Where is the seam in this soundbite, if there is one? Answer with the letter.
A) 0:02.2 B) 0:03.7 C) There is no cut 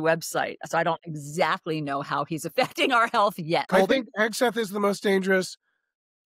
B